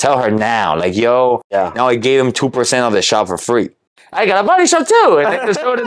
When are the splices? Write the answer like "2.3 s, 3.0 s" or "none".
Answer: 1.4 s, 4.0 s